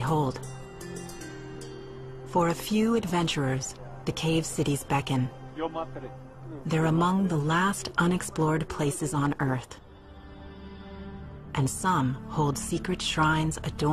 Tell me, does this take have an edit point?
no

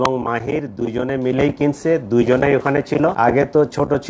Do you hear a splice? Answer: yes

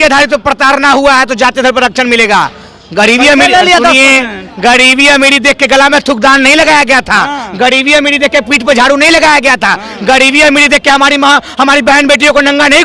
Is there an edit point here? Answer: no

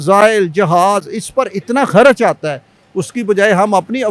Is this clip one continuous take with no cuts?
yes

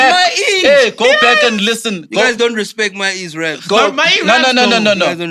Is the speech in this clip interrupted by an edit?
no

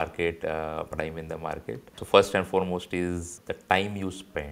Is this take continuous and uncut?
no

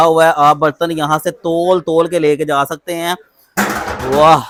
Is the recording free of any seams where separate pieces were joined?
yes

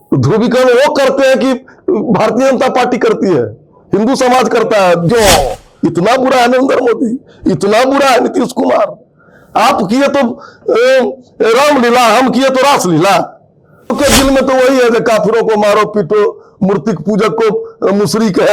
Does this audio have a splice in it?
yes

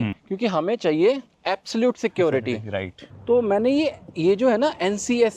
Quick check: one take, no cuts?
no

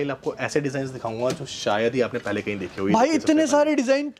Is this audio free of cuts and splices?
yes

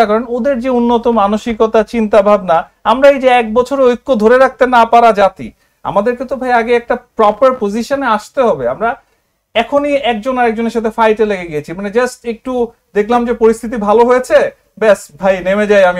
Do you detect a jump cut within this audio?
no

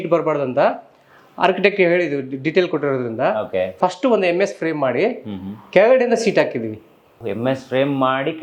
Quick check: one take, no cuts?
no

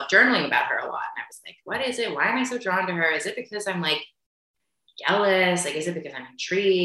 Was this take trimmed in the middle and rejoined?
no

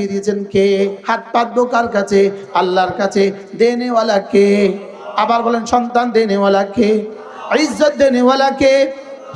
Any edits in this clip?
yes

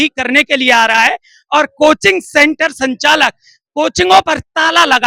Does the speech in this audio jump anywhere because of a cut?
no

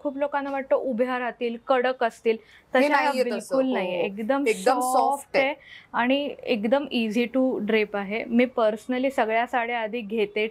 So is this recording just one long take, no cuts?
yes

